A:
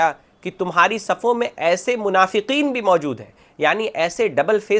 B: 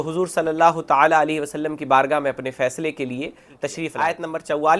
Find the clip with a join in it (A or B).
B